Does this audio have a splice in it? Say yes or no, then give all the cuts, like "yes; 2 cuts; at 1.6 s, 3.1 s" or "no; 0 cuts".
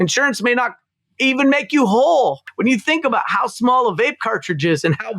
yes; 1 cut; at 2.5 s